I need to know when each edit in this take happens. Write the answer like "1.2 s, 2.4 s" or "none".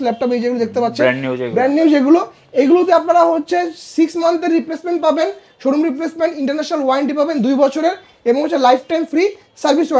none